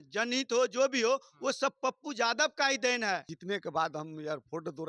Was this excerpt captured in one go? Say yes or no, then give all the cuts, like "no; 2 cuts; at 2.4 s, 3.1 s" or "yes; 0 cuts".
no; 1 cut; at 3.3 s